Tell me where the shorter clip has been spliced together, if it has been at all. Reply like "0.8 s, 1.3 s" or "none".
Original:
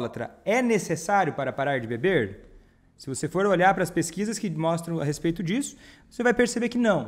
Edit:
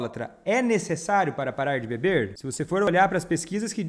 2.9 s